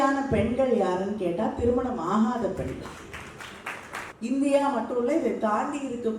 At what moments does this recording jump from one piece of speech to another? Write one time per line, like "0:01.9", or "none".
0:04.1